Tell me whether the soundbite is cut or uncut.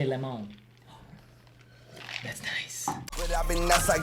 cut